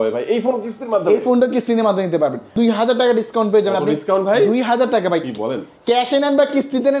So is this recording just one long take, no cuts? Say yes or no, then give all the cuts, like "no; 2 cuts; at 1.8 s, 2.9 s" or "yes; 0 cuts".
no; 1 cut; at 2.5 s